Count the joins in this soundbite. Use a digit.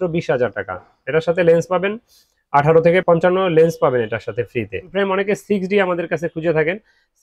2